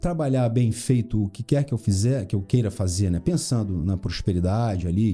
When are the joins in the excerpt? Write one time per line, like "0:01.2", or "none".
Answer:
none